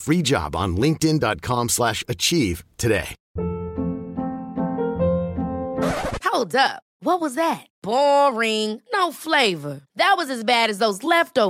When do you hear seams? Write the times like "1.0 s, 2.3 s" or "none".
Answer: 3.2 s